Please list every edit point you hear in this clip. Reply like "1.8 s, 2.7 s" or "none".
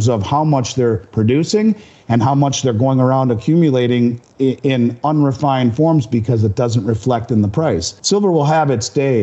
7.9 s